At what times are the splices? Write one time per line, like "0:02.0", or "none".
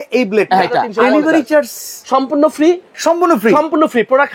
0:00.9
0:02.9